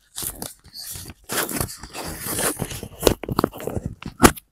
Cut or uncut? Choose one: uncut